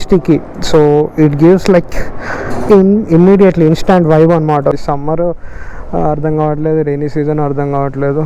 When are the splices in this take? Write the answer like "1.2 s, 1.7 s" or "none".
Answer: 4.8 s